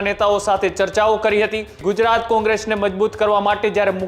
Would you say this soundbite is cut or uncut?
cut